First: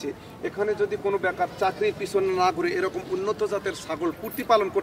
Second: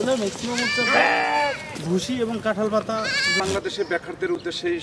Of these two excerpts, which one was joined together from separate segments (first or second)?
second